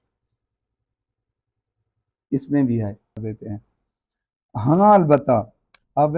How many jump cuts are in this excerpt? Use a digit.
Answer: 1